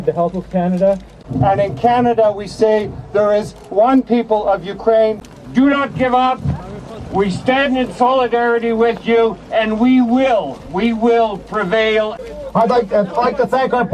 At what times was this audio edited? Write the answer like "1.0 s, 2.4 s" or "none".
1.1 s, 5.3 s, 12.2 s